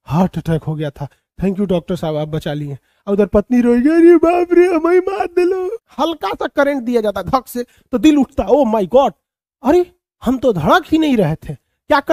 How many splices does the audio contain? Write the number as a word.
one